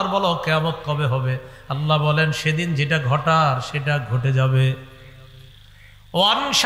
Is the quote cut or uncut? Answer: uncut